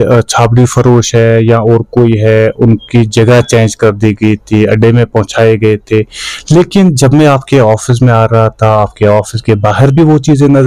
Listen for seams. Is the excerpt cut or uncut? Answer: uncut